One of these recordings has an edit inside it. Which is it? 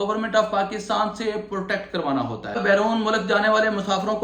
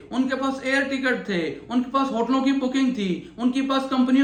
first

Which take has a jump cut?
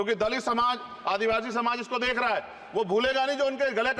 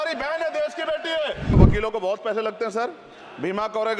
second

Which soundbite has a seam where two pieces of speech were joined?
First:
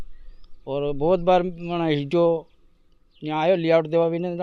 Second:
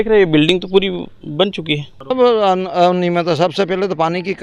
second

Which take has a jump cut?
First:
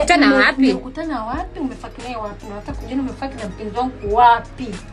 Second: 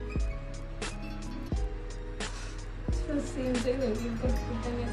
second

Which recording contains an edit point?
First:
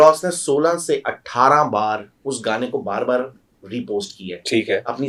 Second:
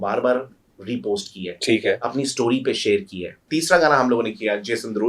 second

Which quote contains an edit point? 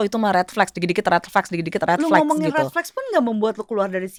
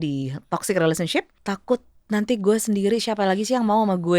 second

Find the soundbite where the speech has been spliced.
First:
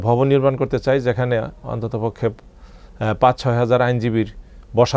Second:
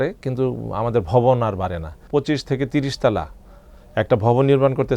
second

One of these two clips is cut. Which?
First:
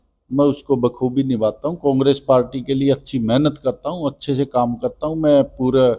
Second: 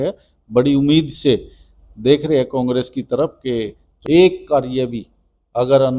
second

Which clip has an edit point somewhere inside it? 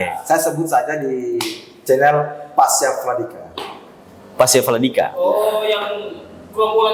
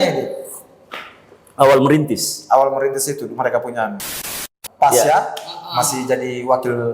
second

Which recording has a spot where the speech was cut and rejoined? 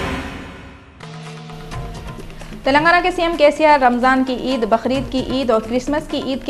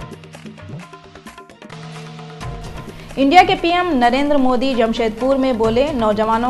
first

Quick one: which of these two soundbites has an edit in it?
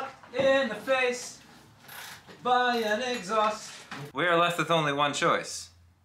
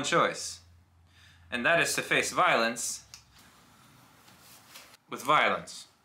first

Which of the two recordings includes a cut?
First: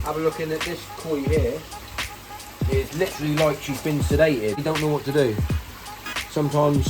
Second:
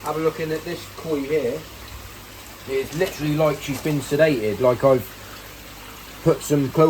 first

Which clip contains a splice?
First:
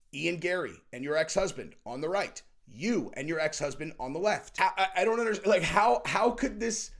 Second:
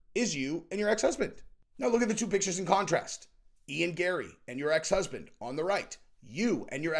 first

